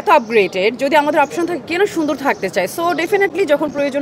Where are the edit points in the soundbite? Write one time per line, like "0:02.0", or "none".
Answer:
none